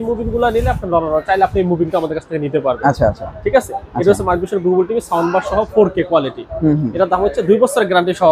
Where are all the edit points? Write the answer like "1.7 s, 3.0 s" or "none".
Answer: none